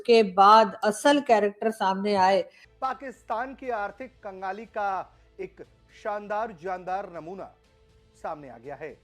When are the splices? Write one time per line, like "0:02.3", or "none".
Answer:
0:02.6